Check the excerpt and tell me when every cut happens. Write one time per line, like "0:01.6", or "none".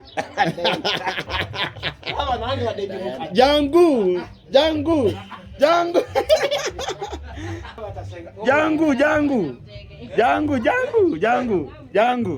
0:07.7